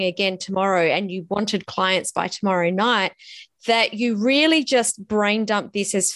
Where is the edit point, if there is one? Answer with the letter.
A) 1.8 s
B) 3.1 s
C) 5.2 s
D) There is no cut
D